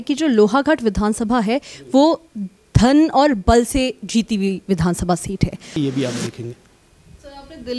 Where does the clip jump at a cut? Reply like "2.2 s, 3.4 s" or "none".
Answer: 5.7 s